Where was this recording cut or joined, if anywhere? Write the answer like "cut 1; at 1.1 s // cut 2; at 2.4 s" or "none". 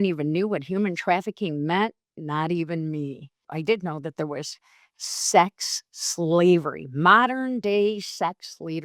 cut 1; at 3.5 s